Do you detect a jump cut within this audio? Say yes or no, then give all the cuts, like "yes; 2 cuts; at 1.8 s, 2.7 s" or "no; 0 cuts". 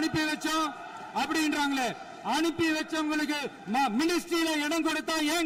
no; 0 cuts